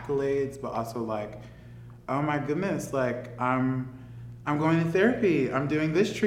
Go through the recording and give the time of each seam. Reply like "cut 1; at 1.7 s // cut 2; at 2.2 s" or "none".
none